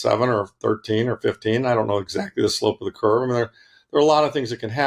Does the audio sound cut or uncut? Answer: uncut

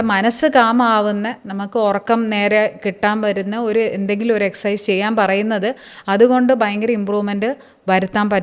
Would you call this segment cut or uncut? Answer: uncut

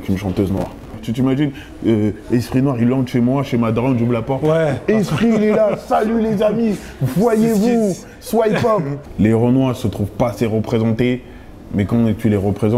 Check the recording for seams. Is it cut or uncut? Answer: cut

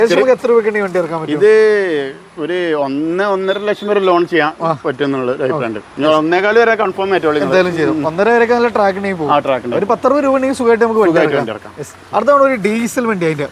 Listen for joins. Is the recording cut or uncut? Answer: uncut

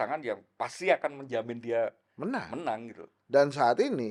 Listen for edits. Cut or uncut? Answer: uncut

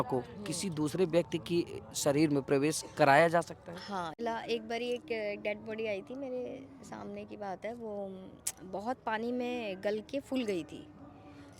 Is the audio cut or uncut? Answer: cut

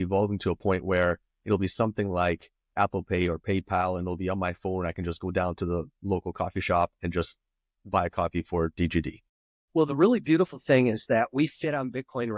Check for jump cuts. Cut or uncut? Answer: uncut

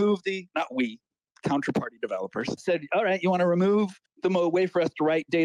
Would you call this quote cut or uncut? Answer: cut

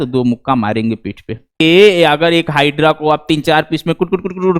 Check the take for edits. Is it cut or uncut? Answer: cut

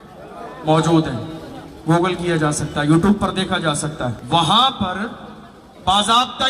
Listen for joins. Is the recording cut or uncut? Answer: cut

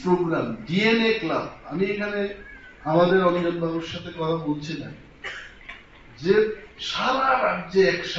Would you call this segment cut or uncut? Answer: uncut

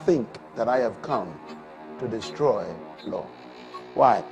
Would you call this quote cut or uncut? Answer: uncut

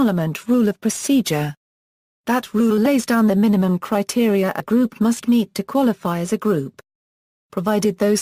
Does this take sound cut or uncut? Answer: uncut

